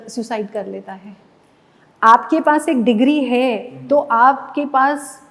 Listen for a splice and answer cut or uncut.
uncut